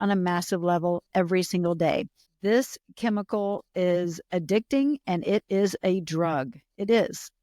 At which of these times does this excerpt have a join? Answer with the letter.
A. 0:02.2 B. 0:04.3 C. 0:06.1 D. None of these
A